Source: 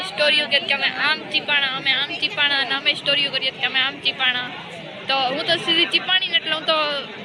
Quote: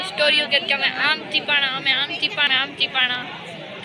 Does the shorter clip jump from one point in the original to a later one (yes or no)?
yes